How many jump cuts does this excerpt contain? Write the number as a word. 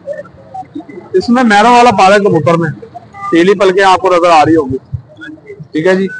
zero